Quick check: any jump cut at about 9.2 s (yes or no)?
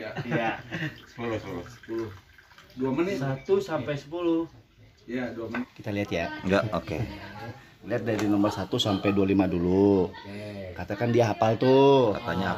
no